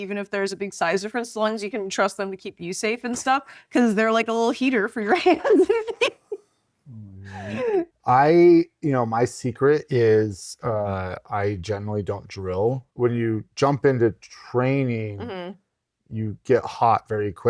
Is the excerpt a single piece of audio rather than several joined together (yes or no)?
no